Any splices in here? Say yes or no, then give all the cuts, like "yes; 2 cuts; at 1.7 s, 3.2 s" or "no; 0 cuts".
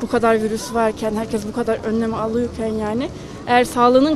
no; 0 cuts